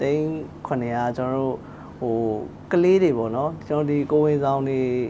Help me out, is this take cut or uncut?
uncut